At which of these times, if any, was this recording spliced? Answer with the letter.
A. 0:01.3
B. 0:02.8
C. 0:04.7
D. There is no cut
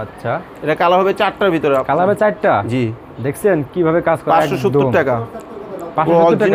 D